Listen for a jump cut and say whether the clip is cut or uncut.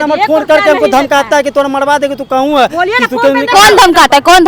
uncut